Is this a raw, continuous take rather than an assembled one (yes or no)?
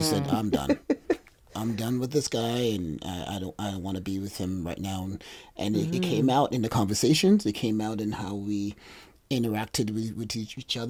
yes